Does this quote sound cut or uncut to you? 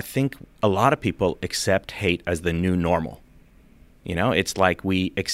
uncut